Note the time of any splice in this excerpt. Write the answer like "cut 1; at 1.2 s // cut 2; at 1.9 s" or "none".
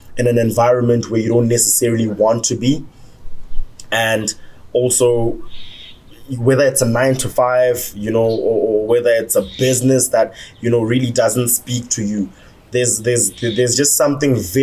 none